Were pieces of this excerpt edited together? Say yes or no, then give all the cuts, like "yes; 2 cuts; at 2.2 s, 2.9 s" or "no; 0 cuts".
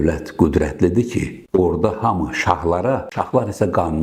no; 0 cuts